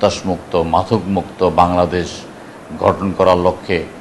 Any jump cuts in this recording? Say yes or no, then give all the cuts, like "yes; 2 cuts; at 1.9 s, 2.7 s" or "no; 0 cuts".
no; 0 cuts